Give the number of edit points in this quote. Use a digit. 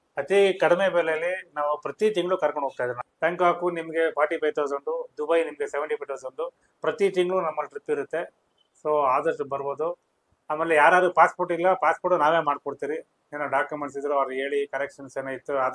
0